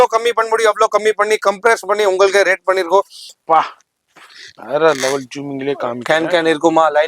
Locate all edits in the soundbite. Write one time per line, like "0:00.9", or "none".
0:03.3